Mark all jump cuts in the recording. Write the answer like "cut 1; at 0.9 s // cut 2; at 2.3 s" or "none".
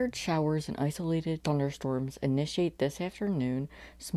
cut 1; at 1.4 s